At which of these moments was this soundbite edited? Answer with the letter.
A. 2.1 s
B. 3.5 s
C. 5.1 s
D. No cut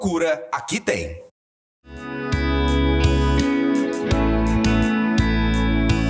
A